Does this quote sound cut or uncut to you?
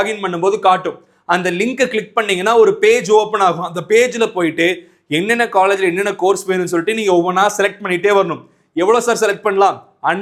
uncut